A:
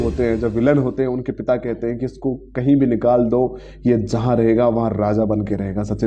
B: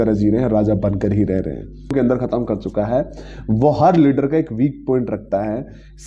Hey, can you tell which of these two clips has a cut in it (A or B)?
B